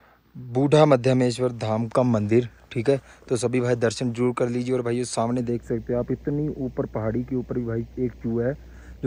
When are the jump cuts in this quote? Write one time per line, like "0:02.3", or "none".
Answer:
none